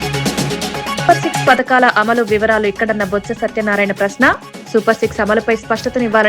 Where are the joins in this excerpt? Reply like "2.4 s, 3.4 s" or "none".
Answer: 1.0 s